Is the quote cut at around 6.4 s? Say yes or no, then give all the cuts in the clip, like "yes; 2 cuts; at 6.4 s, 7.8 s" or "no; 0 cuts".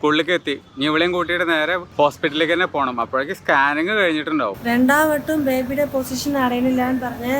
no; 2 cuts; at 1.8 s, 4.6 s